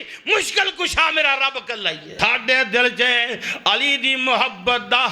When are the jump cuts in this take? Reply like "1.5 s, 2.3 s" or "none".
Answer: 2.0 s